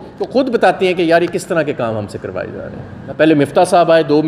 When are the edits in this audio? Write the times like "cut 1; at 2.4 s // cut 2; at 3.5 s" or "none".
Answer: cut 1; at 3.0 s